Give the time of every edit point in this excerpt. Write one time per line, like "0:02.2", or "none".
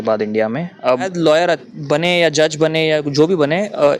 0:01.1